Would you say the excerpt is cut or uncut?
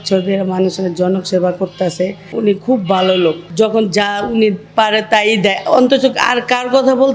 cut